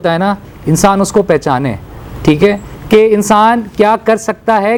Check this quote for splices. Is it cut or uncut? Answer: uncut